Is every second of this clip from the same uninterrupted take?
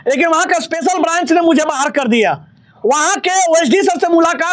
yes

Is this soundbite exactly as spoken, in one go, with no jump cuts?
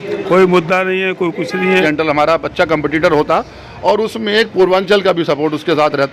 no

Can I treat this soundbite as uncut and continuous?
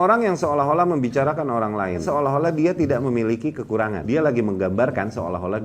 no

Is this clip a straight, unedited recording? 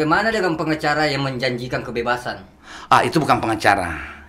yes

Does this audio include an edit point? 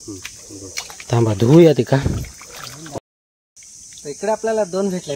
yes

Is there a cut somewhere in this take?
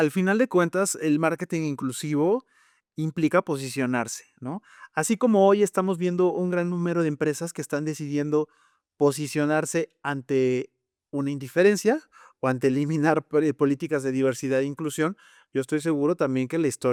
no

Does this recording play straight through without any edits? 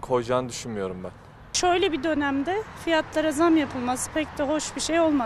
no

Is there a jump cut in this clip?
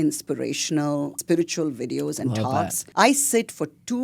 yes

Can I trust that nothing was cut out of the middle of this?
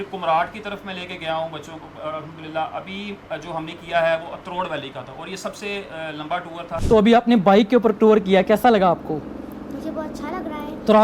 no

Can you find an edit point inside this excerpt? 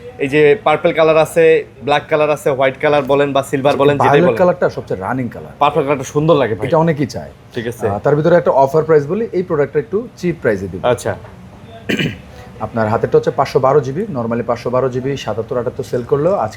no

